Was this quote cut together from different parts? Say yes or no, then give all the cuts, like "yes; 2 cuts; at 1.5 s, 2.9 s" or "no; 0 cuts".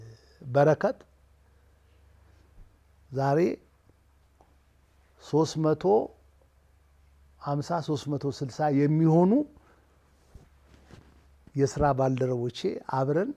no; 0 cuts